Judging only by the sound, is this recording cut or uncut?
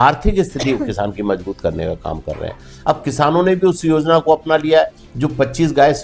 uncut